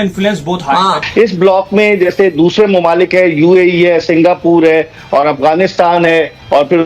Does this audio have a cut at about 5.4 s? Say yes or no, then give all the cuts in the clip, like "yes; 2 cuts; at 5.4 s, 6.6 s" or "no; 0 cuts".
no; 1 cut; at 1.2 s